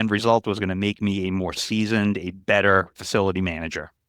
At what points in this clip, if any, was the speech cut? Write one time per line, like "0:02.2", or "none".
0:03.0